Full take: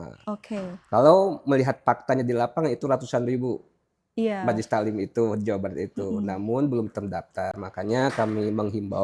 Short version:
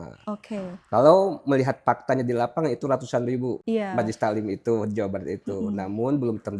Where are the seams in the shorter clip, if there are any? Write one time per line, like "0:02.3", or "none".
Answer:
0:03.6